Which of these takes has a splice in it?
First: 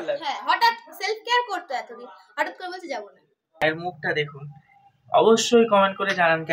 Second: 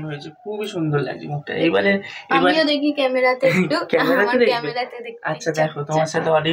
first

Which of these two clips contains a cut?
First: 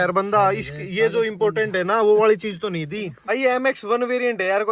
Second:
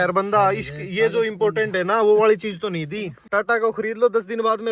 second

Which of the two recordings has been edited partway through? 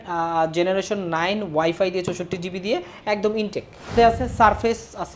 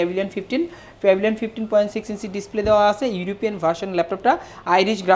first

